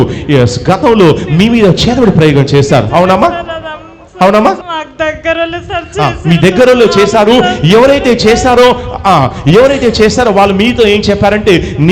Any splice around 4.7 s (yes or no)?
yes